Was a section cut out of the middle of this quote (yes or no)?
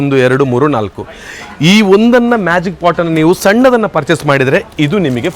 no